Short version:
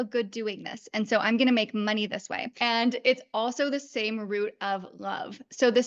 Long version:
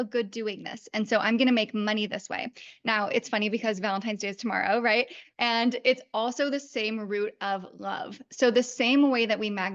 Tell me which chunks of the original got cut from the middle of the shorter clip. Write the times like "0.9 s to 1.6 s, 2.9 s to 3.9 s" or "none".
2.4 s to 5.2 s